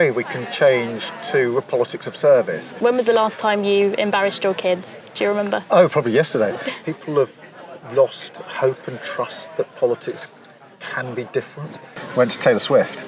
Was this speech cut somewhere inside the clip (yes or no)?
yes